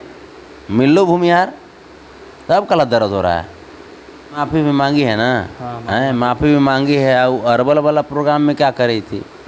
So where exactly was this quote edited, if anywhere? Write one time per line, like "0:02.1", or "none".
0:04.4